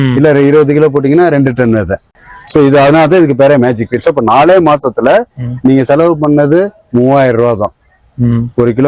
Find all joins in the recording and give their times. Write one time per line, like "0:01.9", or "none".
0:02.1